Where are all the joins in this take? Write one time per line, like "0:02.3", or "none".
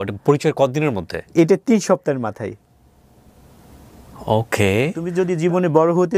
0:05.1